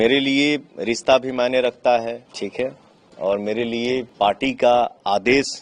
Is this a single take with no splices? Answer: no; 2 cuts; at 2.3 s, 4.1 s

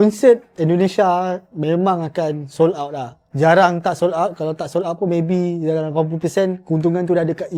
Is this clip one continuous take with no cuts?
yes; 0 cuts

